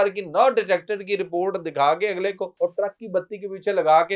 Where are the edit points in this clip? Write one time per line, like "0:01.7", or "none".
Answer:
0:02.5

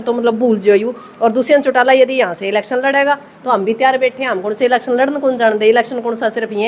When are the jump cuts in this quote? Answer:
none

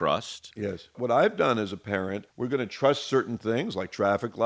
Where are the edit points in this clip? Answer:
0:01.0
0:02.2

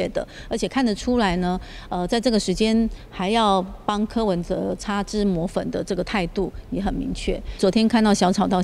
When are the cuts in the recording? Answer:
0:07.6

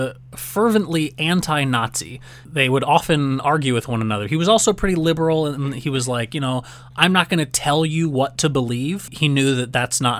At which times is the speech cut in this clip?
0:09.1

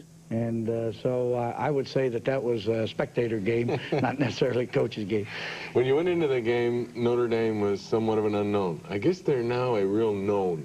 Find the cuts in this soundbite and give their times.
0:09.8

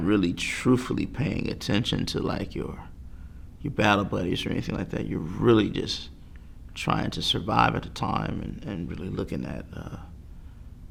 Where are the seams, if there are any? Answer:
none

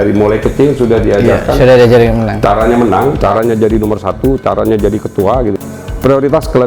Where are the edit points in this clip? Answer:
0:05.6

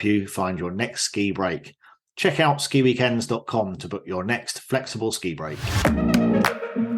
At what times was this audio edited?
0:05.6

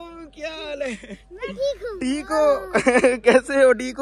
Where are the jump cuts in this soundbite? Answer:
none

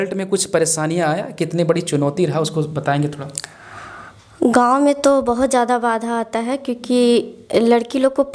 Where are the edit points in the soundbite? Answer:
none

